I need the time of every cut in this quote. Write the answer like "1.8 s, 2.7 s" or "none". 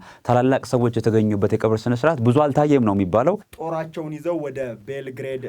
3.5 s

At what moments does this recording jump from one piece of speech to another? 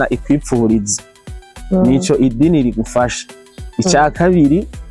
none

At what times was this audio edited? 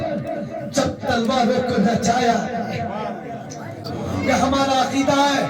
3.8 s

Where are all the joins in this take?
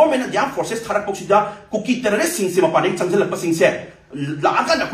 none

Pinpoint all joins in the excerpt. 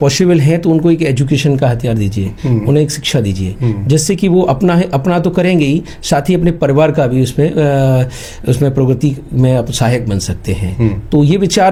none

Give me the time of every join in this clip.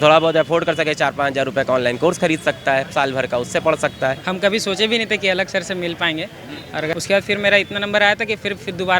4.3 s, 6.9 s

